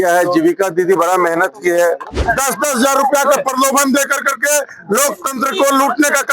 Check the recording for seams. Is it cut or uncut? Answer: cut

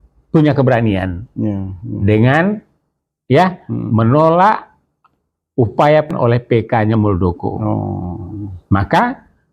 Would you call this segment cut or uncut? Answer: cut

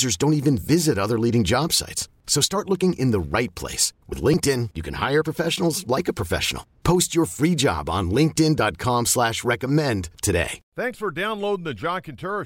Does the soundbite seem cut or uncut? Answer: cut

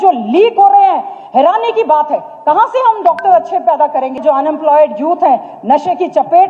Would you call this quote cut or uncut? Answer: cut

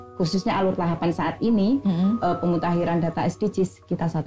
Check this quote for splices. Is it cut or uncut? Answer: uncut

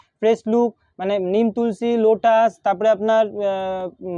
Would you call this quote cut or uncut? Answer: uncut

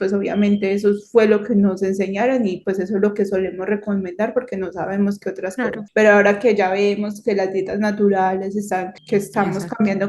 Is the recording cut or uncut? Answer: cut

